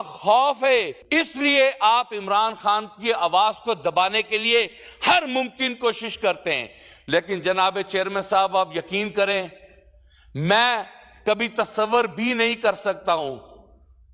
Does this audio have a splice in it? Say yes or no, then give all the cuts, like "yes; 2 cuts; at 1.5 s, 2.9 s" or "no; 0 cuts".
no; 0 cuts